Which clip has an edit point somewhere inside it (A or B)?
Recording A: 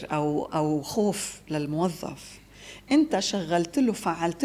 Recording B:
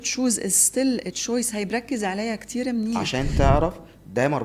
B